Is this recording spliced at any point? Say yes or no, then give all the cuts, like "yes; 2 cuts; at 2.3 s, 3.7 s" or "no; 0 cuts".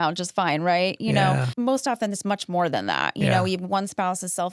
yes; 1 cut; at 1.5 s